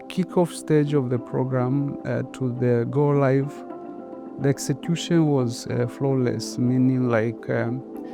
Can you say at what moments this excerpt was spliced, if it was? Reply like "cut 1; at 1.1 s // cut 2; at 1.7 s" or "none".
cut 1; at 1.2 s